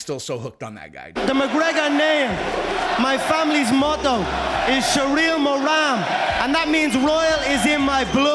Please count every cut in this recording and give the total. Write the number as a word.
one